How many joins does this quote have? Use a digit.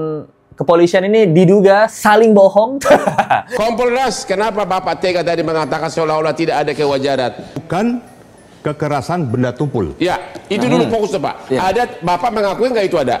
2